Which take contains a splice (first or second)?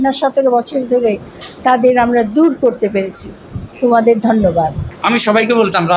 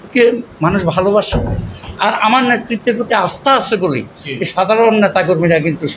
first